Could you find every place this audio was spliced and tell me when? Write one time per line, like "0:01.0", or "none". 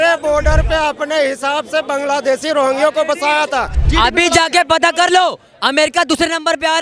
0:03.8